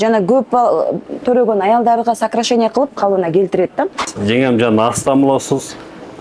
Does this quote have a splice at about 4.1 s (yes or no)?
yes